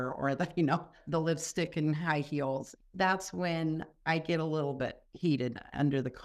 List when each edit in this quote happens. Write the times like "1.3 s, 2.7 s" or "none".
1.0 s, 2.7 s, 5.0 s